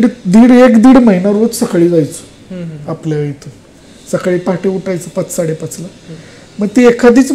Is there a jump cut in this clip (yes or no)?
no